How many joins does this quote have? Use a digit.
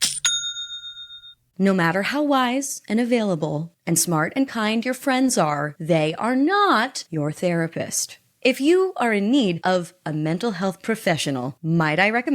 2